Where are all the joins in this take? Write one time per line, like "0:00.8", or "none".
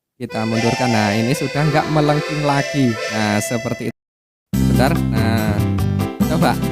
0:03.9